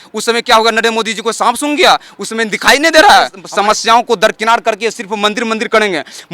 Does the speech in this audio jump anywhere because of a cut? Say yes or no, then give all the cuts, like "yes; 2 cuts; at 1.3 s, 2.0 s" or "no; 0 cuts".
yes; 1 cut; at 3.4 s